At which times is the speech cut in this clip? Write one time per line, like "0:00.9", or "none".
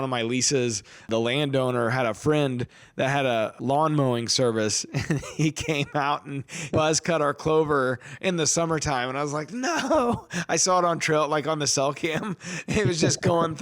0:01.1
0:03.5
0:06.7